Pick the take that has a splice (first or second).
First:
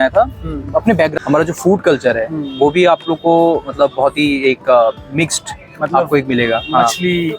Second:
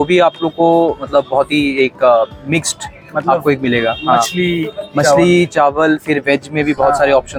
first